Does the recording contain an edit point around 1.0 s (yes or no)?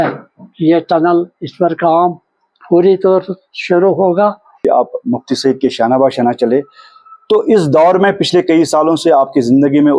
no